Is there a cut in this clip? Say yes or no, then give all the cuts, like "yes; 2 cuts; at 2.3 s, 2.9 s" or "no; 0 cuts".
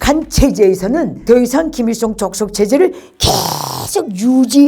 yes; 1 cut; at 1.1 s